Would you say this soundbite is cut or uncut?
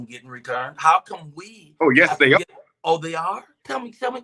uncut